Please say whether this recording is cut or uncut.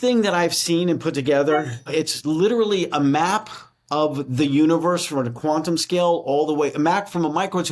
cut